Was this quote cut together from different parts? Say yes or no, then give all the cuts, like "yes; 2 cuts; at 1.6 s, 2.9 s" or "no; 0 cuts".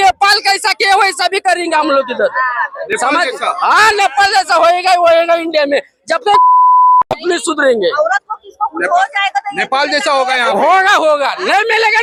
no; 0 cuts